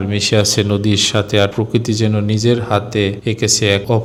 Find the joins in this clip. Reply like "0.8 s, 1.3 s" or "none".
none